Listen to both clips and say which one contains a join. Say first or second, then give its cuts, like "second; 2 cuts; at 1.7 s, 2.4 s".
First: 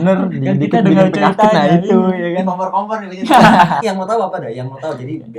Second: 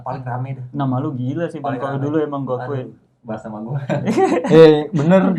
first; 1 cut; at 3.8 s